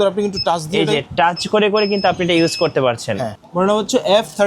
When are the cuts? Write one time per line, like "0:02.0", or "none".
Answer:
0:03.2